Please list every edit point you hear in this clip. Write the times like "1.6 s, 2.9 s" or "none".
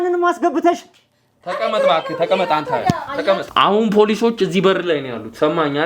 3.5 s